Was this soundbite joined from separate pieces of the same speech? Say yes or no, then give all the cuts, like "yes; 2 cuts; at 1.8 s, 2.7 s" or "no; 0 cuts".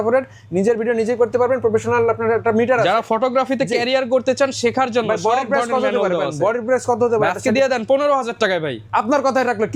no; 0 cuts